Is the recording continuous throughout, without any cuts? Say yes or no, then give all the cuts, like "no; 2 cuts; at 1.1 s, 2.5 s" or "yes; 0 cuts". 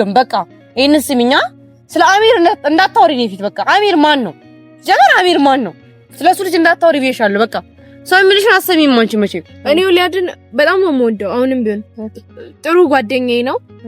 no; 1 cut; at 9.5 s